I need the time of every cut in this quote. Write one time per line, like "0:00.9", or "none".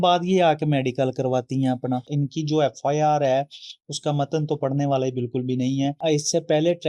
0:02.1
0:06.0